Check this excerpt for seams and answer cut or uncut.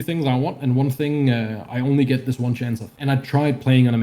cut